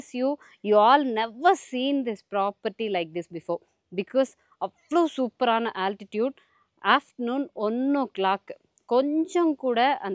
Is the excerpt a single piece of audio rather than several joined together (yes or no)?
yes